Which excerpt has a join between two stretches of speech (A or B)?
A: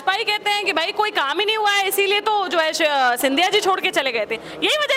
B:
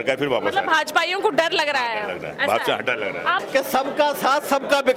B